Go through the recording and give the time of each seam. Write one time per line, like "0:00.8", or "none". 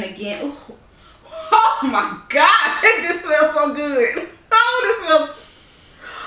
none